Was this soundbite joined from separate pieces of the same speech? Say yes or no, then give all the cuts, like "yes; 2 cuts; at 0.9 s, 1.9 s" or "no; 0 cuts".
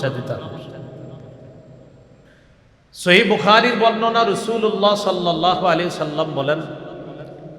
yes; 1 cut; at 2.8 s